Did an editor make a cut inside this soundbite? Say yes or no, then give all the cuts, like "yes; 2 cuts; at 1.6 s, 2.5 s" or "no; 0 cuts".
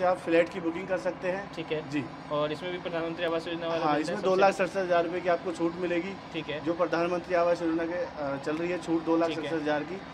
no; 0 cuts